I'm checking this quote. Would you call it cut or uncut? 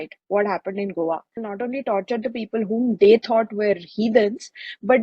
cut